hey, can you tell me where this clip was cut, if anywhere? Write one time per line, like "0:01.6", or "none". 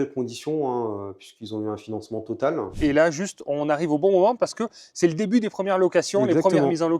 0:02.7